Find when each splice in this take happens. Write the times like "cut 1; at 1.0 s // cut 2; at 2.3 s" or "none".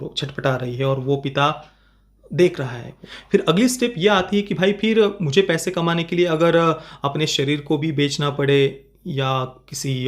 cut 1; at 3.1 s

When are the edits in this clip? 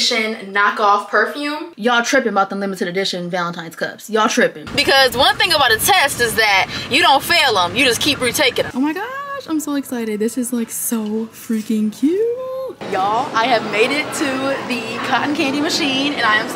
cut 1; at 1.6 s // cut 2; at 4.7 s // cut 3; at 8.7 s // cut 4; at 12.7 s

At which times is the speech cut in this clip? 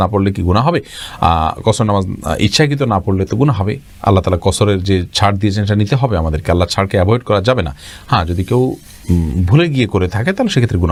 none

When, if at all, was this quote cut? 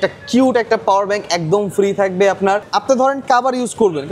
cut 1; at 2.7 s

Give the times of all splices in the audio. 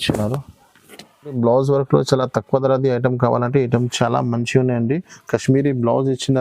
cut 1; at 1.3 s

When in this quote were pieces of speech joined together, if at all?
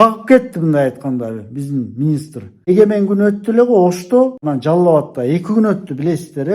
cut 1; at 2.7 s // cut 2; at 4.4 s

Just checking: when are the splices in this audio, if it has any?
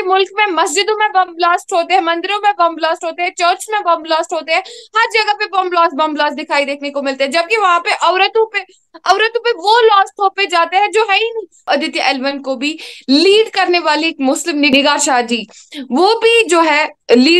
cut 1; at 11.7 s // cut 2; at 14.7 s

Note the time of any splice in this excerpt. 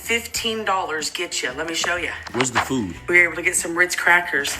cut 1; at 3.0 s

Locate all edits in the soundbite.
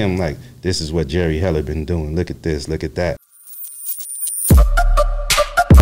cut 1; at 3.3 s

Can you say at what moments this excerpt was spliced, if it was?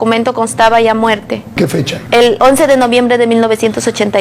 cut 1; at 1.5 s

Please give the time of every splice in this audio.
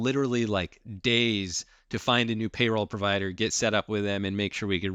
none

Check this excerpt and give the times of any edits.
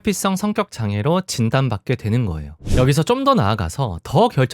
cut 1; at 2.6 s

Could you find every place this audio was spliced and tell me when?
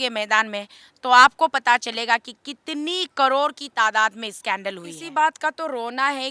cut 1; at 4.9 s

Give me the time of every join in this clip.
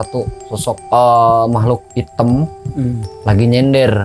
cut 1; at 0.8 s // cut 2; at 1.9 s // cut 3; at 3.1 s

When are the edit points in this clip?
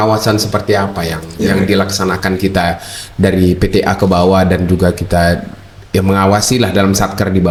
none

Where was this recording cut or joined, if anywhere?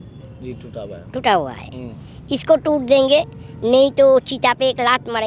none

